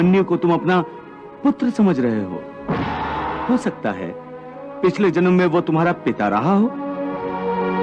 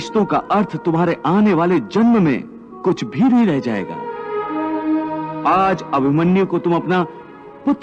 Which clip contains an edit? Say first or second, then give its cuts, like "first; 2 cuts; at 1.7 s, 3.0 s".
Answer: first; 1 cut; at 3.4 s